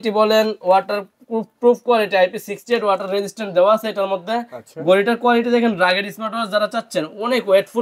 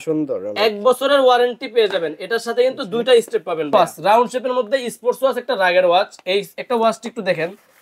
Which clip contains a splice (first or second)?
second